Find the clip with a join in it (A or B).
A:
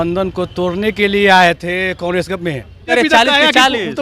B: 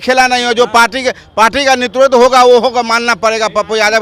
A